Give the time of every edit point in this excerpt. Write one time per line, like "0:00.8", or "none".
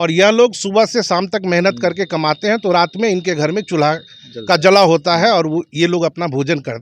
none